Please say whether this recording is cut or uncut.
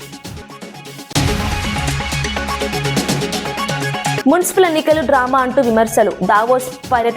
cut